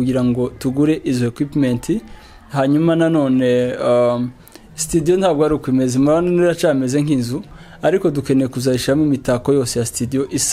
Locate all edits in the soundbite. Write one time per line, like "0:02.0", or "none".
none